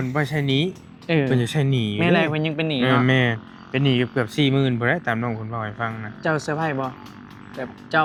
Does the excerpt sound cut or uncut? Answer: uncut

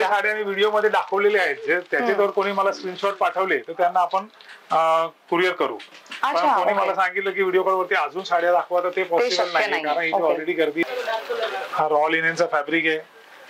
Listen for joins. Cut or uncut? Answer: cut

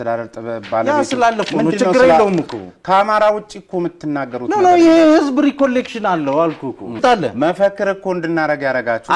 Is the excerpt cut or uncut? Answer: cut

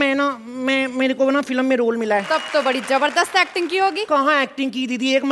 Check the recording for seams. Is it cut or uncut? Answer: cut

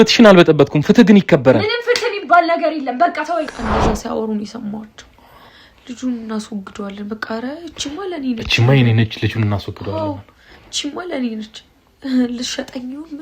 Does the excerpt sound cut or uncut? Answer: cut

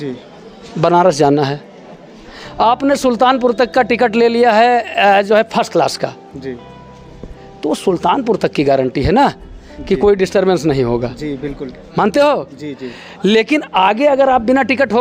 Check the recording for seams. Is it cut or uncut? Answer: uncut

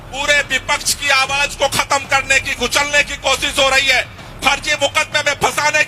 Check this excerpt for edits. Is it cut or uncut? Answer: uncut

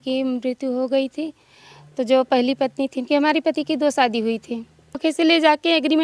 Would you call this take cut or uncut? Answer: cut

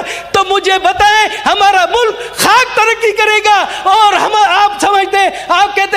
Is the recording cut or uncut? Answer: uncut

